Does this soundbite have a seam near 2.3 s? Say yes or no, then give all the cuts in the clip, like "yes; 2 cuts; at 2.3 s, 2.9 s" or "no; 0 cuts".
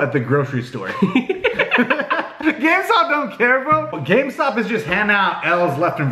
no; 1 cut; at 3.8 s